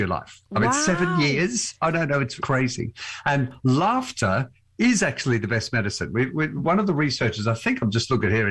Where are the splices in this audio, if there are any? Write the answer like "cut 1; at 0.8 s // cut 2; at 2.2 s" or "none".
cut 1; at 2.4 s